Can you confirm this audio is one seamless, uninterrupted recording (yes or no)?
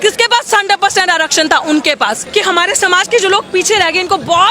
no